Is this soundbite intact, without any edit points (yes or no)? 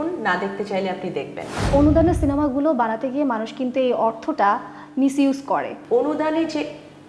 no